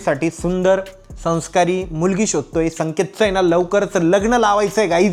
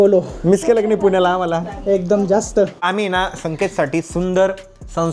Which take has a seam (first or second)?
second